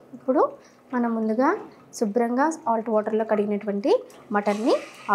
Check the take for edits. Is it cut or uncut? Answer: uncut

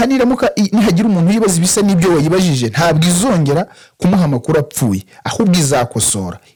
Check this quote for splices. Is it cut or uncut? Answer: uncut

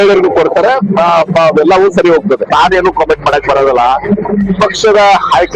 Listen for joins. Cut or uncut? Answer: cut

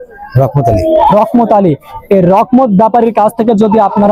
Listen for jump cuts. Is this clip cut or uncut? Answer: uncut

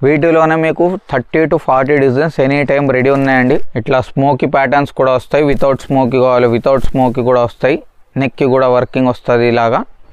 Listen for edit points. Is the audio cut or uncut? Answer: cut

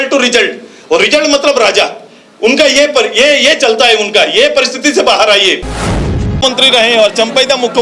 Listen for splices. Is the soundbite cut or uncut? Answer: cut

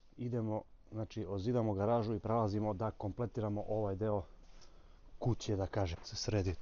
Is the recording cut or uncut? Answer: uncut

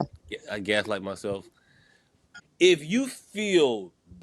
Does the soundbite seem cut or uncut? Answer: cut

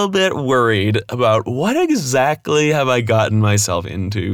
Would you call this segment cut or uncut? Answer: uncut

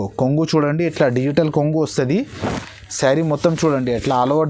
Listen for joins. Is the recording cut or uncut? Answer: uncut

